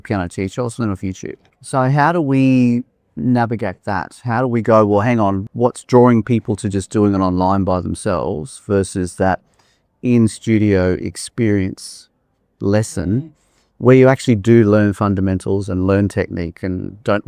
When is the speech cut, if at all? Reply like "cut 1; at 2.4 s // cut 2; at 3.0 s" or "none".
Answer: cut 1; at 1.5 s // cut 2; at 5.4 s